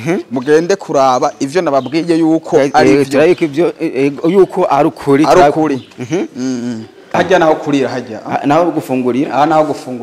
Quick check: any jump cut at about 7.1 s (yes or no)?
yes